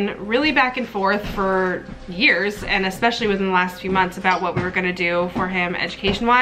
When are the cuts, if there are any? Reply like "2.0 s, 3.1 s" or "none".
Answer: none